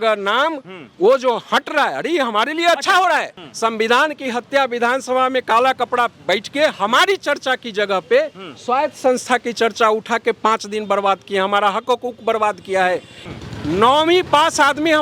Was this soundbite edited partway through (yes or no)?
yes